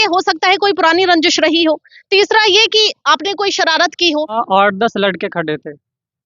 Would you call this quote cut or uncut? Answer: cut